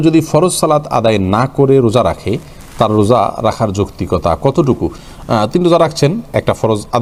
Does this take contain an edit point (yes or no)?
no